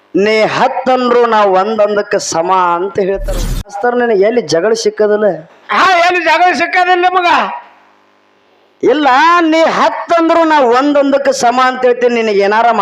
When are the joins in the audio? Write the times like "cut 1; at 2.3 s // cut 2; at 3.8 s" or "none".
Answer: cut 1; at 3.7 s